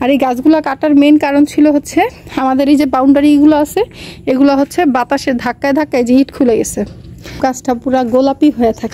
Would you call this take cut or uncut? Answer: cut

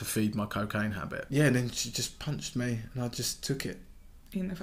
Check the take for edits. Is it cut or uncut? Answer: cut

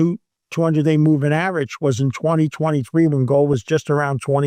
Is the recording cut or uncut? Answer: uncut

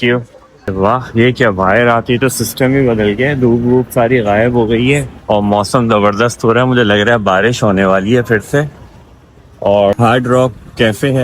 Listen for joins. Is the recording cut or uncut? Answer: cut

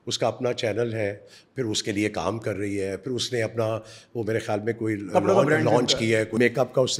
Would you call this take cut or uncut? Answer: uncut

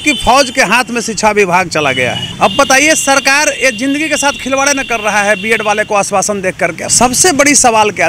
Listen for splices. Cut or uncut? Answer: cut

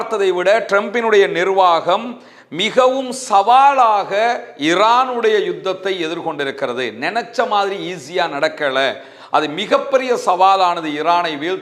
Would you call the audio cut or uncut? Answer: uncut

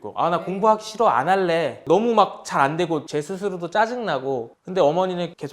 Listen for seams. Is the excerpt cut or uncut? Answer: cut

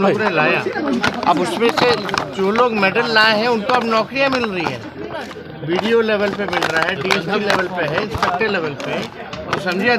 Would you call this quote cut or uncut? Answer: uncut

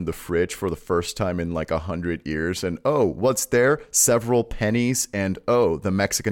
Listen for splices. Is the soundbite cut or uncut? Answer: uncut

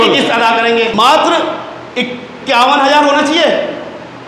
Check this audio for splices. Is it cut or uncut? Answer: cut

